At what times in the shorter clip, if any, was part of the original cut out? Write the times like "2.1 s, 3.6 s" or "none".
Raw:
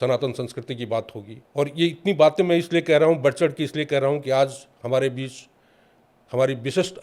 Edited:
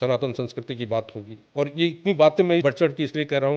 2.6 s